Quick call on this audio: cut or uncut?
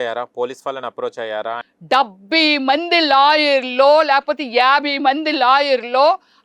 cut